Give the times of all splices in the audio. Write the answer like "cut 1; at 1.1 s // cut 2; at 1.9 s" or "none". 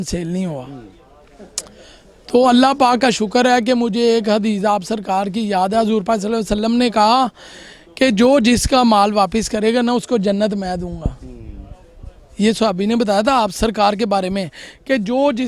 none